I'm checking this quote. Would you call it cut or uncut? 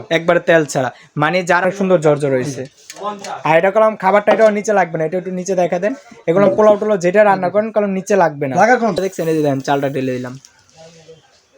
cut